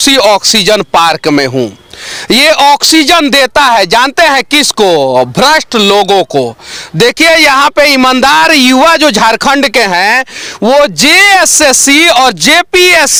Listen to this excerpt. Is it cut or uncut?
uncut